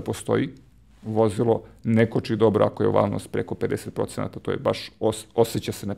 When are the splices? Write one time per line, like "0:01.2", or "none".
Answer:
none